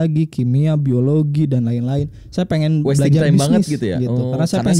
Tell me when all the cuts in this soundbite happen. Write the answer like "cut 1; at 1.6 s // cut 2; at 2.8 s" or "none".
none

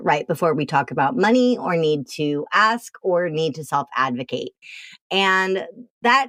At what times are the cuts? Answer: none

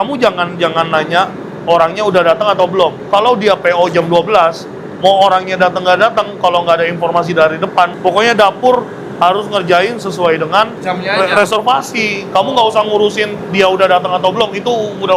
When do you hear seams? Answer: none

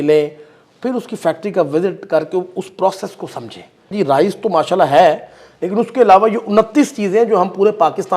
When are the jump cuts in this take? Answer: cut 1; at 3.9 s

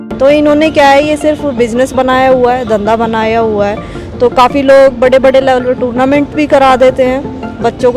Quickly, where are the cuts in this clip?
none

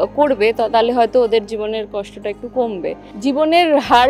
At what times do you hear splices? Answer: cut 1; at 3.1 s

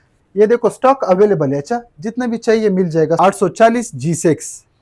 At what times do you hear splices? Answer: cut 1; at 3.2 s

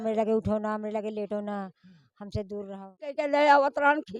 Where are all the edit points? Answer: cut 1; at 3.2 s

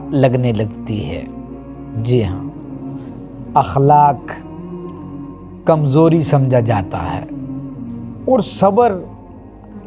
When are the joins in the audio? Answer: none

